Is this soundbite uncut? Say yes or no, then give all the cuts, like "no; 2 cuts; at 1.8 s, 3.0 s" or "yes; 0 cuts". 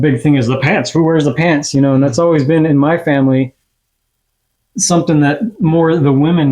yes; 0 cuts